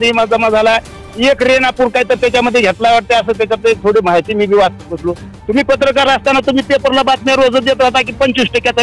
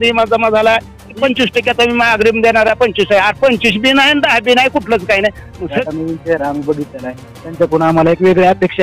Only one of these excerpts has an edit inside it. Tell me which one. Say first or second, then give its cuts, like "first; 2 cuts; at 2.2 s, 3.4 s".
second; 2 cuts; at 1.1 s, 5.8 s